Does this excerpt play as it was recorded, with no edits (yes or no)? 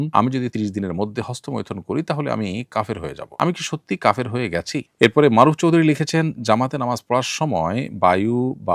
no